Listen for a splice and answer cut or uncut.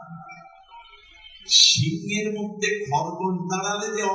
uncut